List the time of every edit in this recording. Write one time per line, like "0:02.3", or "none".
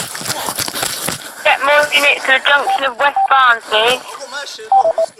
none